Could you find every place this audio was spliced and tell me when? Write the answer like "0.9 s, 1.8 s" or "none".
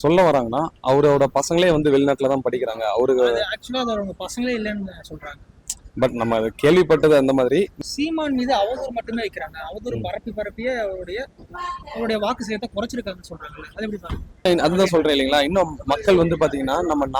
7.8 s, 14.4 s